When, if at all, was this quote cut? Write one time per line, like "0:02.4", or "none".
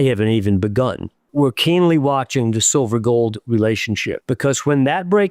0:01.3
0:04.1